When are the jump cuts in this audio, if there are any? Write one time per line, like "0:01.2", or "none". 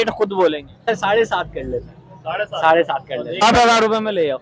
0:00.9
0:03.4